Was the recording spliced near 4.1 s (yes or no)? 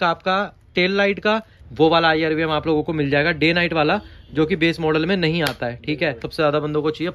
no